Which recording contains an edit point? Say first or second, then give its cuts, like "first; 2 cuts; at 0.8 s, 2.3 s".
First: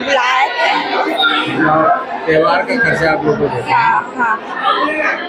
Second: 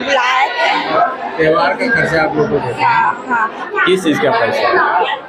second; 2 cuts; at 0.9 s, 3.6 s